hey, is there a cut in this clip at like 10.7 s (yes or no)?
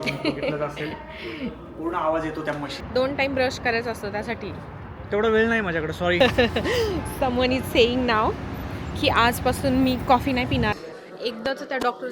yes